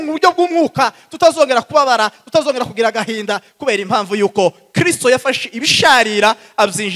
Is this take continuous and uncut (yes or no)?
yes